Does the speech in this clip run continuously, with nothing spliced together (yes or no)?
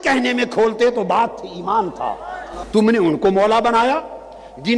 no